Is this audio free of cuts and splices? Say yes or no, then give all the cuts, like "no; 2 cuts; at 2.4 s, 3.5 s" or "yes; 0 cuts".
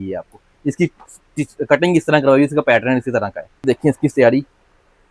no; 1 cut; at 3.6 s